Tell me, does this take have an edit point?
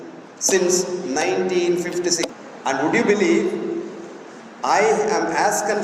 yes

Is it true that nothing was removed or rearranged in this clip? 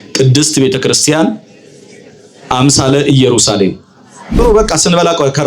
no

